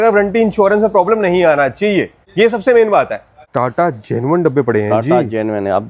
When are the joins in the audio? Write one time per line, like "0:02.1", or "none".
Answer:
0:02.2
0:03.4